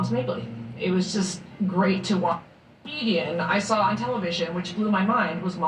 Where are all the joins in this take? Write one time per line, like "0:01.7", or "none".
0:02.3
0:03.9